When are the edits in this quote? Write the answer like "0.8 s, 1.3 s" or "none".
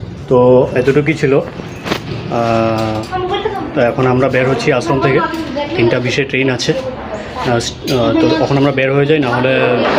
none